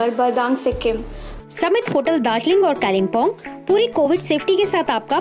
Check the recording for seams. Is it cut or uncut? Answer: cut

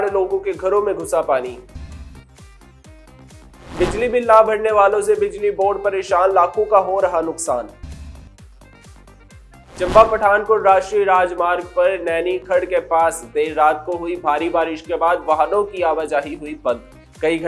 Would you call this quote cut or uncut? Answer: uncut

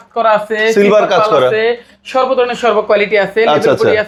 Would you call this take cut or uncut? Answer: uncut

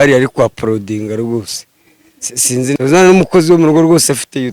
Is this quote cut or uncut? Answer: cut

